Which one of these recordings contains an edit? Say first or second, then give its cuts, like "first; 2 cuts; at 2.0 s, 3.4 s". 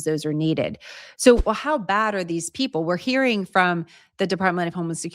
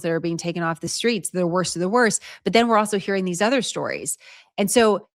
first; 1 cut; at 1.4 s